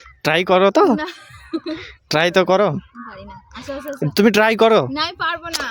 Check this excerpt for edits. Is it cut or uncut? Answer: uncut